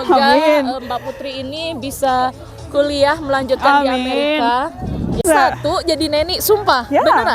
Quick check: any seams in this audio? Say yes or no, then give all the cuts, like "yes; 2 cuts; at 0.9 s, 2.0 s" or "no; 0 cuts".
yes; 1 cut; at 5.2 s